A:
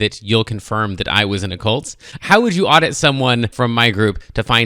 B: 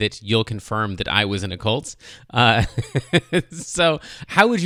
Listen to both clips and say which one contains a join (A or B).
A